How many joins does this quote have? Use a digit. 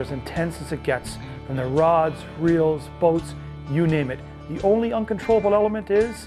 0